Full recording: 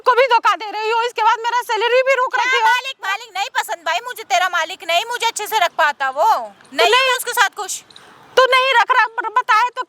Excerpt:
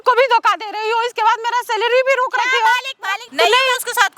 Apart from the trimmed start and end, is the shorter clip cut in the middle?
yes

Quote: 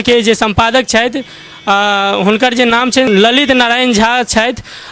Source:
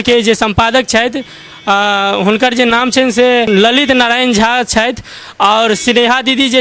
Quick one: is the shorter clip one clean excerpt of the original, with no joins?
no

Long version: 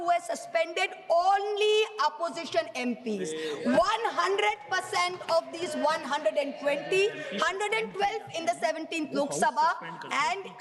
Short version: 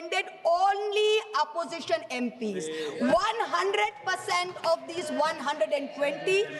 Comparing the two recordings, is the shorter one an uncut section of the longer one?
yes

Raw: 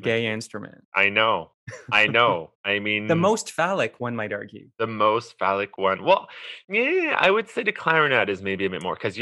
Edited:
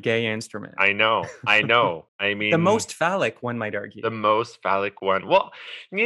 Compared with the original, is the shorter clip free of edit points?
no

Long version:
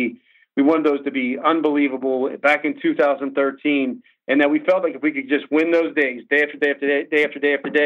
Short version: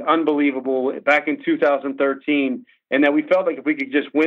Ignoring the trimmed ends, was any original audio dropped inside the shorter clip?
no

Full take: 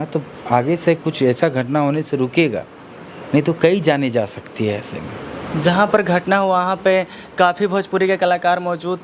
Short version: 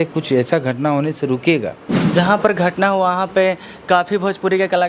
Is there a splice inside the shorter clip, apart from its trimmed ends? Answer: yes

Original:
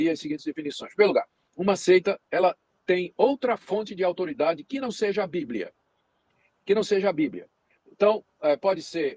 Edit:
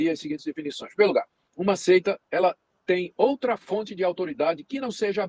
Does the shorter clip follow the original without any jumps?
yes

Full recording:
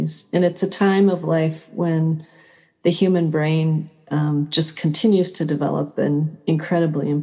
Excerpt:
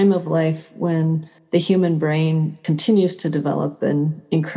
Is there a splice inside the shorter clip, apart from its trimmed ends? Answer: yes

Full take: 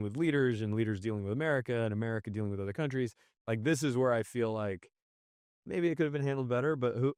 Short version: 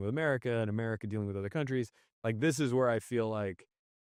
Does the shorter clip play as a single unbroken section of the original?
yes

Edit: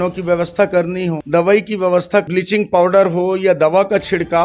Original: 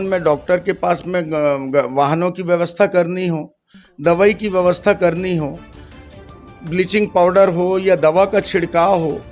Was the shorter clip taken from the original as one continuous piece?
no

